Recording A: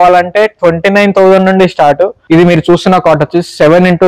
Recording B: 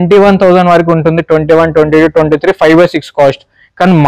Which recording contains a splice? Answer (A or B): A